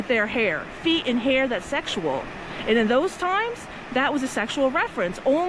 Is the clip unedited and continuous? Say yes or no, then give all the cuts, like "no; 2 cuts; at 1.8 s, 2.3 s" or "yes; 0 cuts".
yes; 0 cuts